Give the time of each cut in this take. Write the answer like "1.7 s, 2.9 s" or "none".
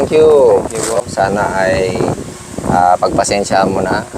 1.0 s